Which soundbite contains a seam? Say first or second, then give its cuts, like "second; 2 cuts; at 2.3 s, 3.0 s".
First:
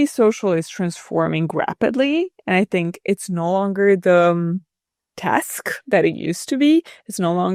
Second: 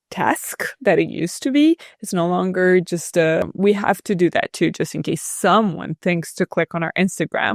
second; 1 cut; at 3.5 s